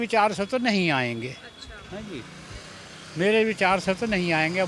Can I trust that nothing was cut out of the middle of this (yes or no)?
yes